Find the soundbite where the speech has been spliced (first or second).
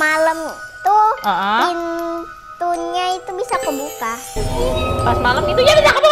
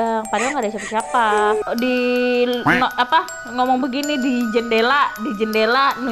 second